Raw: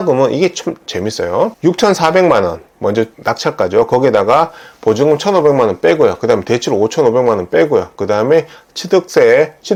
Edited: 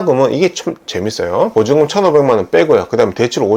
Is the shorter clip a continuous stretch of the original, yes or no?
no